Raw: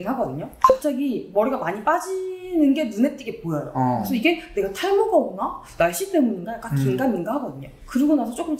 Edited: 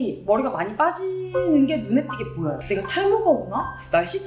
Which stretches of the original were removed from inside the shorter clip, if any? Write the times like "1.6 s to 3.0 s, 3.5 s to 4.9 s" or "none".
3.7 s to 4.5 s